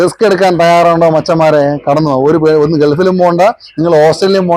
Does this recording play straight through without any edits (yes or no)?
yes